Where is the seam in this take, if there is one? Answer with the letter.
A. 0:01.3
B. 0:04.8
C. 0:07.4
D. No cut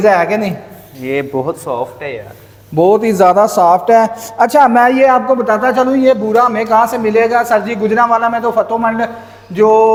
D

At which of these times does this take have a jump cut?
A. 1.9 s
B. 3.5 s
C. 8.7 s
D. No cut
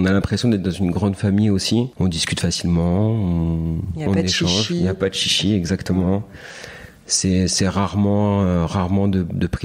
A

